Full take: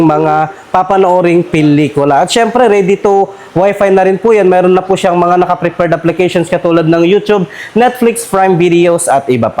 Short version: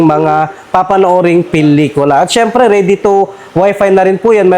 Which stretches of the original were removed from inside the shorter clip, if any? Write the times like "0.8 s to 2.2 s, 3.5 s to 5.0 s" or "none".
none